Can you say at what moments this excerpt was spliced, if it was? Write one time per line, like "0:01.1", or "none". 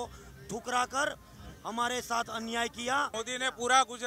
0:03.1